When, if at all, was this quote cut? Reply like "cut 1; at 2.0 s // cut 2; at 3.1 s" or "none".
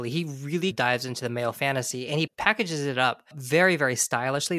cut 1; at 3.3 s

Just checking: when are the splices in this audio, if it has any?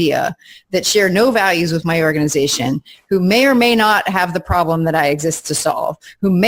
none

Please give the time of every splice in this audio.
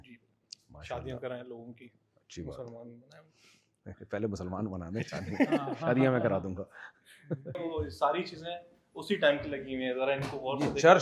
cut 1; at 7.5 s

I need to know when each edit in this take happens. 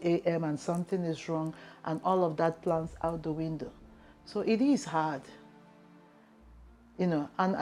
none

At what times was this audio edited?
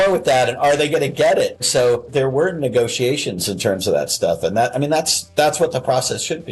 cut 1; at 1.6 s

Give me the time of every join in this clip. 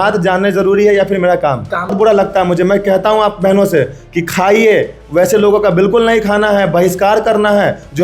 cut 1; at 1.9 s

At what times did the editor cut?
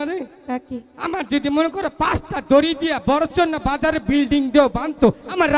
none

